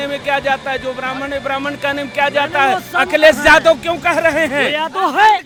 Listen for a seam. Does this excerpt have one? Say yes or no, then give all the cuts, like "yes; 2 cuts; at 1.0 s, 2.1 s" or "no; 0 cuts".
no; 0 cuts